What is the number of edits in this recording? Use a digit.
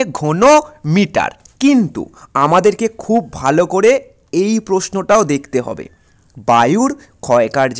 1